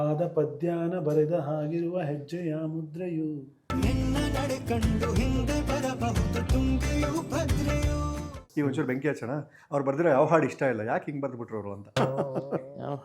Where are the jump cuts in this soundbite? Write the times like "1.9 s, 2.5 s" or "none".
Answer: 8.3 s